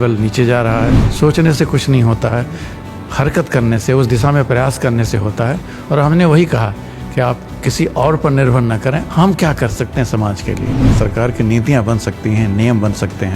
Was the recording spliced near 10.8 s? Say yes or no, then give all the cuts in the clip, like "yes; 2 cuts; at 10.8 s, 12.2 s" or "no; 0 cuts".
yes; 2 cuts; at 1.1 s, 10.8 s